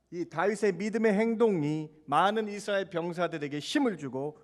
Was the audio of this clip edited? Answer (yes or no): no